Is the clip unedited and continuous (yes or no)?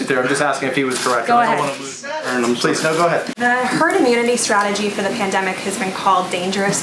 no